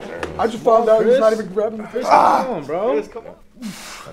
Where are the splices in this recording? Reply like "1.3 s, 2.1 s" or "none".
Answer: 3.2 s